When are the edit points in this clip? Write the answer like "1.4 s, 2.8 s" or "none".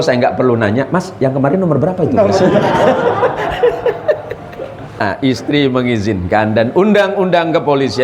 5.0 s